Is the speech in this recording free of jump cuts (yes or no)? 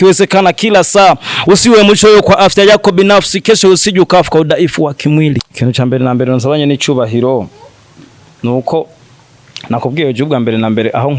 no